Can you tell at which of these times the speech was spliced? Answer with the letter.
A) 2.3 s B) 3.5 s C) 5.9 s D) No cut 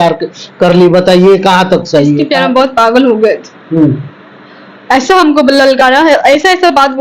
A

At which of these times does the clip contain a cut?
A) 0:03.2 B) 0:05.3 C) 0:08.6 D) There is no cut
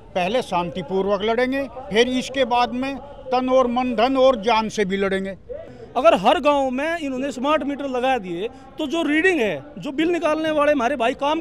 B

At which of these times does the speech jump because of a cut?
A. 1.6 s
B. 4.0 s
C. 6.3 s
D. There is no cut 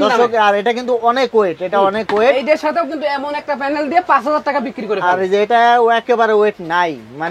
D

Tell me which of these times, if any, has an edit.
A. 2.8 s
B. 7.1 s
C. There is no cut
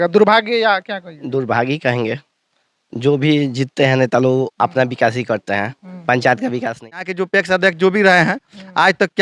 B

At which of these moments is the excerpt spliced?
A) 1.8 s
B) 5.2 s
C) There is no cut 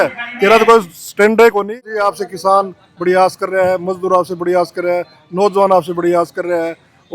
A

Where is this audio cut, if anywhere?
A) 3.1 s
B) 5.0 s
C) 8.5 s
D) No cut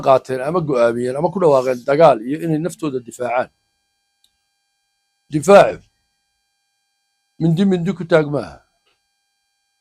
D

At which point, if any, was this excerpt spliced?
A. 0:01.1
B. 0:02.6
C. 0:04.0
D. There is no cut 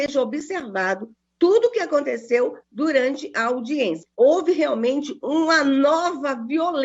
C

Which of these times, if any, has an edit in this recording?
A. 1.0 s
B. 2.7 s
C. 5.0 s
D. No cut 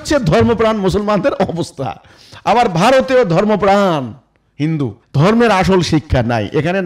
C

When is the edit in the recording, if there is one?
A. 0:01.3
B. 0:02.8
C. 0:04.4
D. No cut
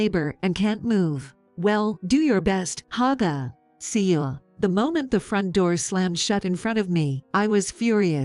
C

